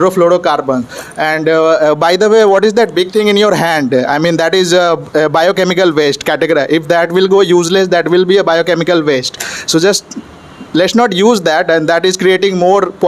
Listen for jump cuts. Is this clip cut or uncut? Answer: uncut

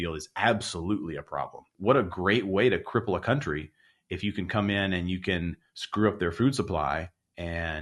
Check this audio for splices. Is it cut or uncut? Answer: cut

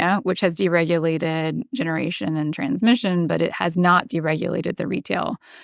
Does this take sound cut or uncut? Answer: uncut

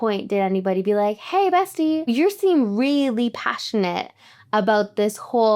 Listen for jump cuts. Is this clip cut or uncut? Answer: cut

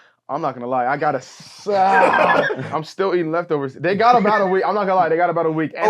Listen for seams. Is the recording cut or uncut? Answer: cut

